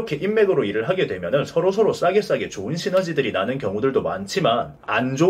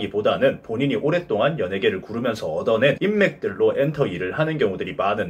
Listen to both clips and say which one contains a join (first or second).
second